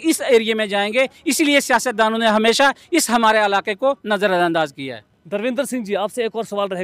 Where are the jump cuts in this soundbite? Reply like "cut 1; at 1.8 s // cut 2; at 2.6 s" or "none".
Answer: none